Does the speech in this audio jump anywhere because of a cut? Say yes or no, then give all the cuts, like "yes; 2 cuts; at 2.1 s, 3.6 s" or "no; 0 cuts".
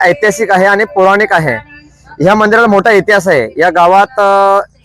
no; 0 cuts